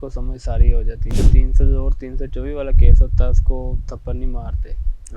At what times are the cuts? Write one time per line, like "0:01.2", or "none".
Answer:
0:01.1